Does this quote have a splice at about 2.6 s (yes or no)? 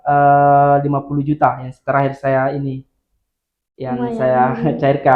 no